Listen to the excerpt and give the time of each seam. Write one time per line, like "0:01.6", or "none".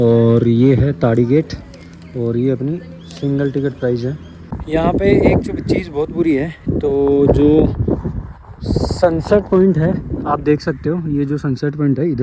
0:04.5